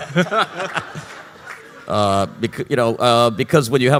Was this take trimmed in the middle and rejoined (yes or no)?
no